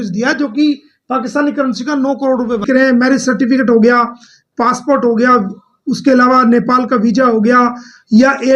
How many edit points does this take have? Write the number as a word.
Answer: one